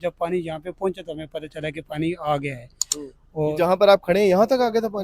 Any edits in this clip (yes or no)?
no